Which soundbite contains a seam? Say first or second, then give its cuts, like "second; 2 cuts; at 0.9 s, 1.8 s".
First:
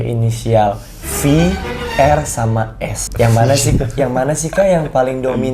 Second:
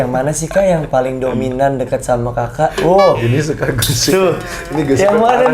first; 1 cut; at 3.0 s